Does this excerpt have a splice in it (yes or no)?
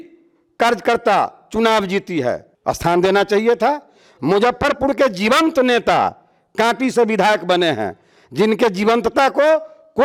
no